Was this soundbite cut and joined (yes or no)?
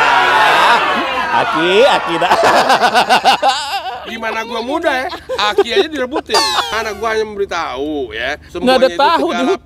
yes